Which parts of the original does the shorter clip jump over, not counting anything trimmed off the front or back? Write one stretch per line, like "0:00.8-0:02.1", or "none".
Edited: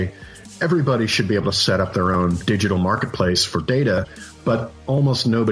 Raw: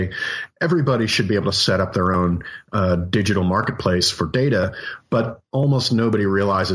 0:02.4-0:03.1